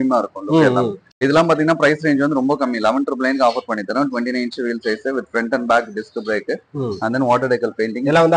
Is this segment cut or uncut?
cut